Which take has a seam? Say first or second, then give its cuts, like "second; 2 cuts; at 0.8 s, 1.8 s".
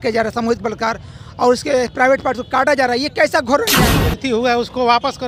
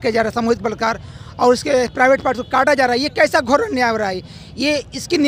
first; 1 cut; at 3.9 s